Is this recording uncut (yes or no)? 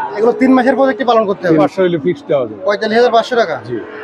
no